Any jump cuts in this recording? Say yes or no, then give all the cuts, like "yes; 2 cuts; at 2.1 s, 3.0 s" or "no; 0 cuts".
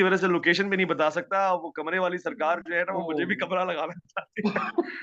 no; 0 cuts